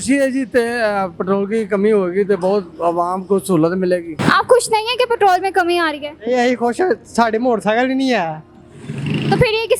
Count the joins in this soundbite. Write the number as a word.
one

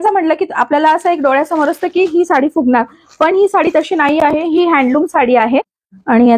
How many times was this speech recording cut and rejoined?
one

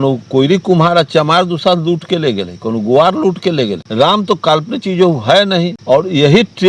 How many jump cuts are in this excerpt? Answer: two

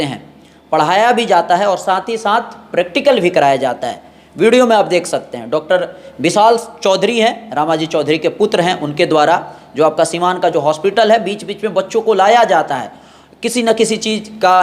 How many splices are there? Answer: zero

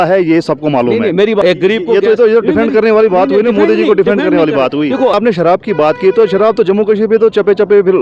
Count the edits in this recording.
two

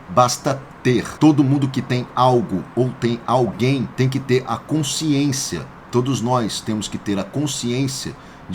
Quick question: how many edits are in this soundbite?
two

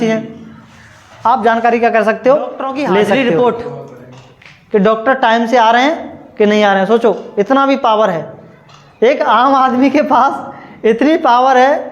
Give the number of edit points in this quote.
one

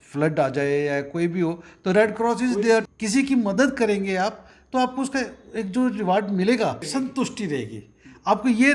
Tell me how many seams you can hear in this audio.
two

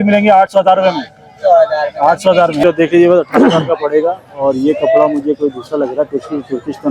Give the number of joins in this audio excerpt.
one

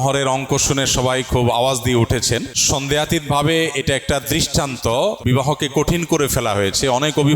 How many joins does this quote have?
two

